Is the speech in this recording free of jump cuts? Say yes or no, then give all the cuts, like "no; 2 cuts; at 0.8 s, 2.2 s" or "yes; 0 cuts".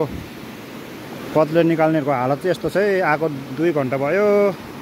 yes; 0 cuts